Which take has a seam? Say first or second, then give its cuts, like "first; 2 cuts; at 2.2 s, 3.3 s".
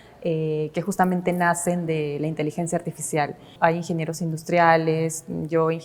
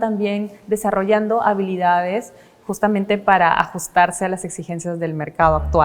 first; 1 cut; at 3.5 s